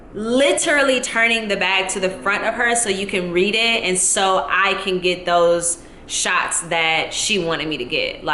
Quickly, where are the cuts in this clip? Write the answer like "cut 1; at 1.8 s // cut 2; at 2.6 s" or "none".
none